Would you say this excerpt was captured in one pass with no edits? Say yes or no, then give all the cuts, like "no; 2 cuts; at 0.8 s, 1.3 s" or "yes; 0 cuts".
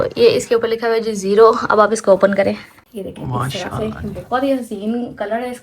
no; 1 cut; at 2.8 s